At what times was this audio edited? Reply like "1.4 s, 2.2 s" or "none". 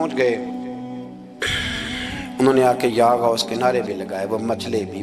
none